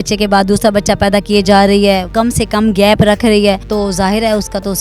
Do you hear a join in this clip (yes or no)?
yes